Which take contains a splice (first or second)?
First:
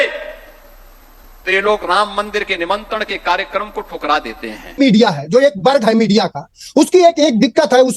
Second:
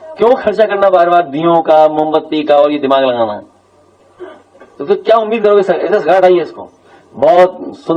first